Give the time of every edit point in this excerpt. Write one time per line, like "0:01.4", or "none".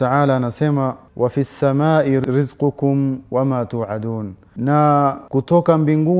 0:01.0
0:02.2
0:04.4
0:05.2

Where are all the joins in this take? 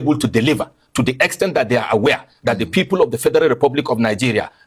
none

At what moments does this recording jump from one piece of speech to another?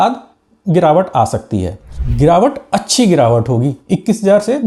0:02.0

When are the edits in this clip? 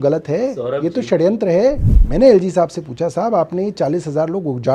0:01.8

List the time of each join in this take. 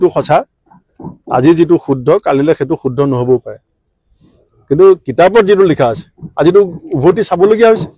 none

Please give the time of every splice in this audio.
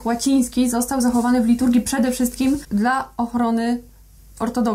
0:02.6

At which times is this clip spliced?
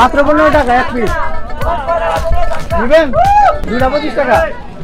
none

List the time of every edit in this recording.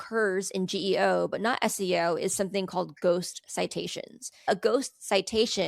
0:04.5

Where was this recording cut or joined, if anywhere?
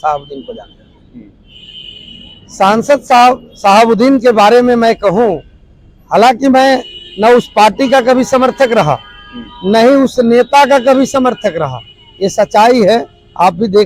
none

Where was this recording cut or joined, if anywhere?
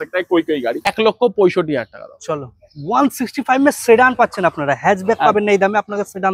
0:00.9

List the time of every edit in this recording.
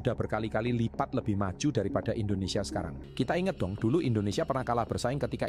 0:02.9

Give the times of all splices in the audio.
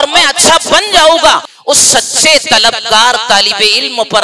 0:01.5

